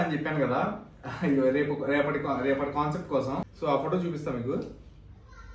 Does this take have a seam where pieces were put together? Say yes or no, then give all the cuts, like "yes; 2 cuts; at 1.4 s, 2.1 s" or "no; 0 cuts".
yes; 1 cut; at 3.5 s